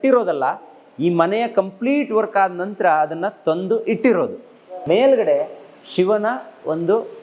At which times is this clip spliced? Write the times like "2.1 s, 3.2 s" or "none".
4.7 s